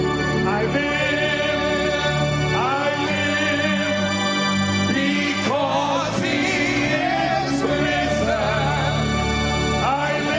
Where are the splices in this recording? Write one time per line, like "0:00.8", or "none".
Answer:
none